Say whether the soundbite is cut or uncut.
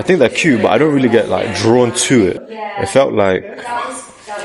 cut